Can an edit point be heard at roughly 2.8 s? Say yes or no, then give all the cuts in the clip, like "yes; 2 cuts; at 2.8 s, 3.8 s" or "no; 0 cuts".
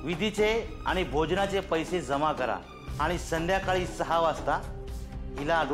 yes; 1 cut; at 2.8 s